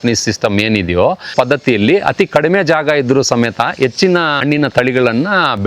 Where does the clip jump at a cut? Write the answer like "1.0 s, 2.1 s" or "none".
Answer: 1.3 s, 4.4 s